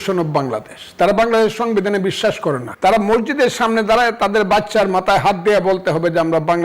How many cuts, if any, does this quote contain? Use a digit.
1